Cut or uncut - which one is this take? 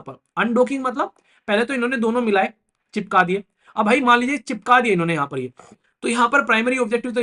cut